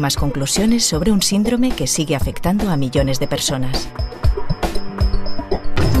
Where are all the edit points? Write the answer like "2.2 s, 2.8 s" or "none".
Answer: 3.9 s